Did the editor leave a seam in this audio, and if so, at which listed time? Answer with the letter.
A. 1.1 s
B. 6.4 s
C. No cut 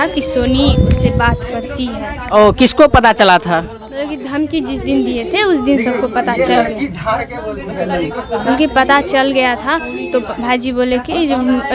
C